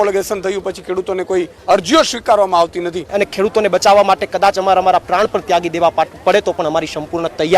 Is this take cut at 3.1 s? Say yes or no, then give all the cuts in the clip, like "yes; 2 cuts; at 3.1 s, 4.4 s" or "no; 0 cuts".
yes; 1 cut; at 3.1 s